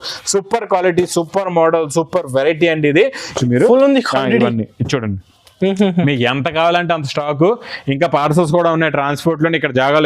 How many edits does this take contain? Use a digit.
1